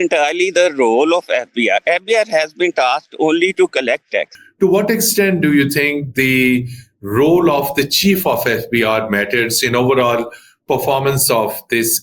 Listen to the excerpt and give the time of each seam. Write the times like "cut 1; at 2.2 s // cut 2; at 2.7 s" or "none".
cut 1; at 4.4 s